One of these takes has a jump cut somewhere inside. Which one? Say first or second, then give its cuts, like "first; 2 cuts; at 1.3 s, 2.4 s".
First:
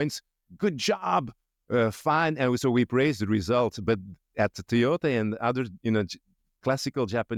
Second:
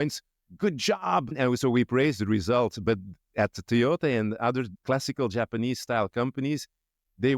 second; 2 cuts; at 1.3 s, 4.7 s